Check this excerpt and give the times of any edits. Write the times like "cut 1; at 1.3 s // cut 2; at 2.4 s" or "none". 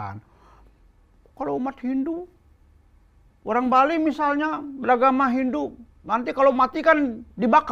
none